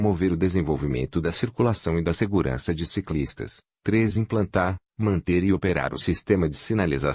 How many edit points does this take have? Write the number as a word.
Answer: zero